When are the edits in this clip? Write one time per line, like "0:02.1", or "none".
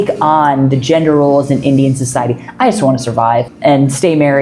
0:03.5